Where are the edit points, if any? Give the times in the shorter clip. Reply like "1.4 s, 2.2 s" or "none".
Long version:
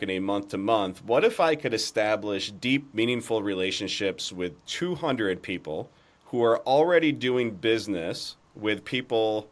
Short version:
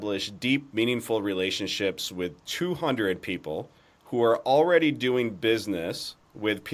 none